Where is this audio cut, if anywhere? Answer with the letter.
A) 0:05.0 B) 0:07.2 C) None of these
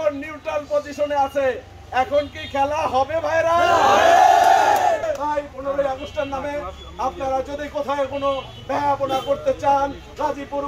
A